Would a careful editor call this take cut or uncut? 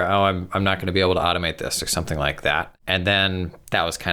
cut